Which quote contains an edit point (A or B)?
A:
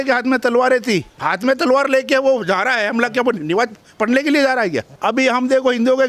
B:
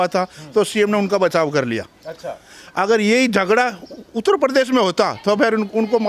A